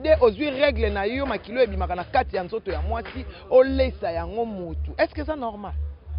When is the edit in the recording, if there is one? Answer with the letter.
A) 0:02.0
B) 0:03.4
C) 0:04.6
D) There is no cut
D